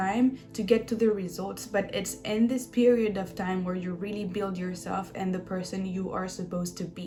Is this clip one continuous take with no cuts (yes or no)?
yes